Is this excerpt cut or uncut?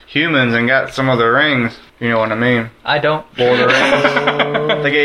cut